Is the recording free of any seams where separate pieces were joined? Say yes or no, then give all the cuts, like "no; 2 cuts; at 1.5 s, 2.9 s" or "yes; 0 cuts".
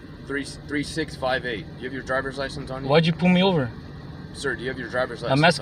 yes; 0 cuts